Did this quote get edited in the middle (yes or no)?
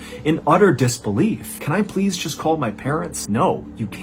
yes